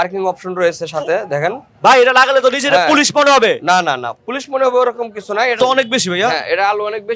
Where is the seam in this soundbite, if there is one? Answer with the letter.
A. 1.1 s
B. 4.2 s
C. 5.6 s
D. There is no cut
C